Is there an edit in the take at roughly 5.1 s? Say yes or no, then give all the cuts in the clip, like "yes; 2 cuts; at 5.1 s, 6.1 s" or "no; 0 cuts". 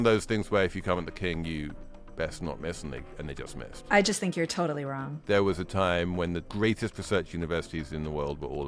yes; 2 cuts; at 5.1 s, 6.5 s